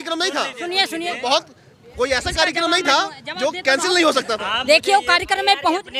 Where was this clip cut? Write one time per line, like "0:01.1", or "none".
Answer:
none